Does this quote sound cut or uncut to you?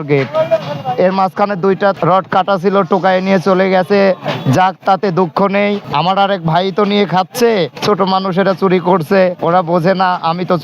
cut